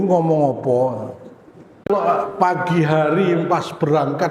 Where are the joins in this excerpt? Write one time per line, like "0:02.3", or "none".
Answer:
0:01.9